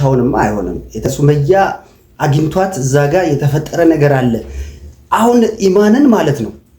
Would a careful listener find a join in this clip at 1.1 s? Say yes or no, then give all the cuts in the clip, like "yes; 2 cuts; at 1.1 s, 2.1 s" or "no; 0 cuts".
yes; 1 cut; at 1.1 s